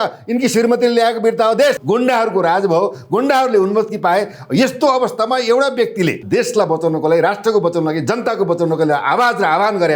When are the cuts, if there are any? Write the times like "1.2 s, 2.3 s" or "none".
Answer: 1.8 s, 6.2 s